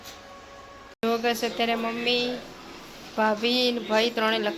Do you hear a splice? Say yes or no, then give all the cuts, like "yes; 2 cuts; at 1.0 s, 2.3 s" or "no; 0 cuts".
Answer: yes; 1 cut; at 1.0 s